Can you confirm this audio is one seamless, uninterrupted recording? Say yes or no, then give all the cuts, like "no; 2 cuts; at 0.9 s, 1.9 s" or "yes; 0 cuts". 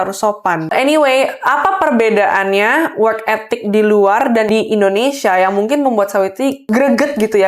no; 3 cuts; at 0.7 s, 4.5 s, 6.6 s